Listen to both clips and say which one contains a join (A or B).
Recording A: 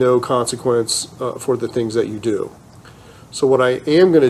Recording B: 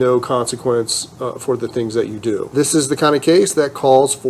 B